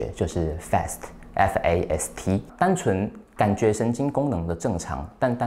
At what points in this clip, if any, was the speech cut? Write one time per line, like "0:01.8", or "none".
0:02.5